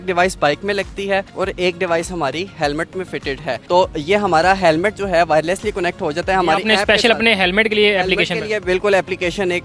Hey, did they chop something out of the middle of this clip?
no; 0 cuts

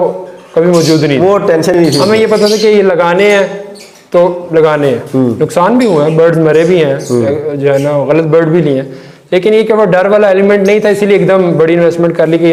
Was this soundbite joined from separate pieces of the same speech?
no; 0 cuts

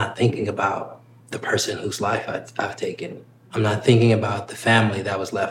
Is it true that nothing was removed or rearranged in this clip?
no; 2 cuts; at 1.1 s, 3.5 s

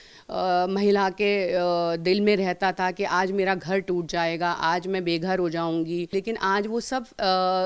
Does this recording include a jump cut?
yes; 1 cut; at 6.1 s

